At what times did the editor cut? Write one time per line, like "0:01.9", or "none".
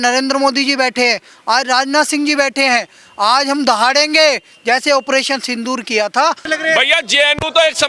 0:06.4

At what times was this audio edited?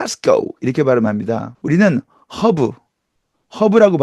0:01.5

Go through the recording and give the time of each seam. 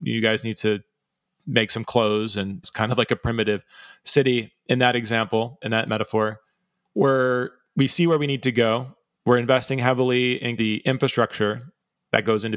0:02.7
0:05.6
0:10.5

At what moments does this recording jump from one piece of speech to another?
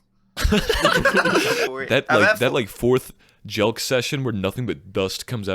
0:01.7

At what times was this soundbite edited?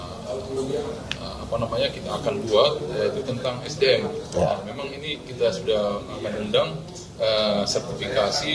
none

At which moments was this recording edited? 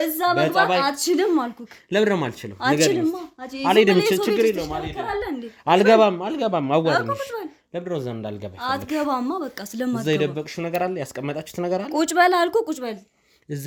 none

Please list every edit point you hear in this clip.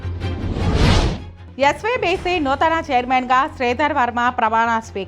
0:01.3

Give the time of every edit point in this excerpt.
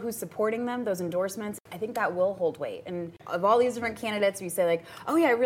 0:01.6
0:03.2

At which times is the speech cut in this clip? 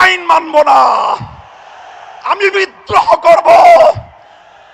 none

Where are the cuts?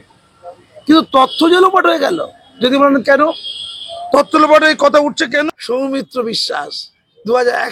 0:05.4

